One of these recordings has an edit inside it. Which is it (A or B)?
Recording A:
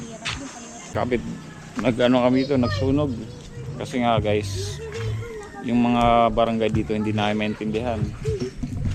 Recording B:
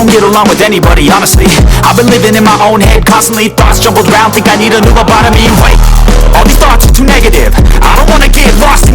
A